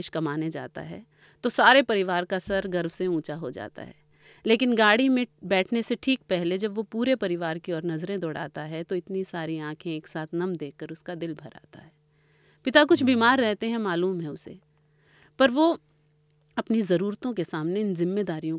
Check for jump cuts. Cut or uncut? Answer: uncut